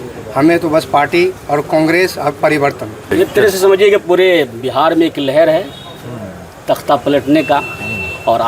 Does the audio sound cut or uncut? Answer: cut